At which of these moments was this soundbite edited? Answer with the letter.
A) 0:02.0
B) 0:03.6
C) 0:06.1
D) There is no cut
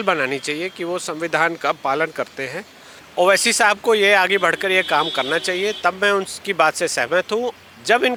D